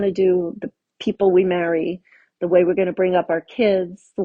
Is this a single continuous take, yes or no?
yes